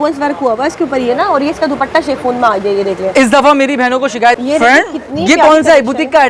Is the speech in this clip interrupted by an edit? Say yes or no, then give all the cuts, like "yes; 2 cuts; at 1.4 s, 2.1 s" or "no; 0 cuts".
yes; 1 cut; at 4.4 s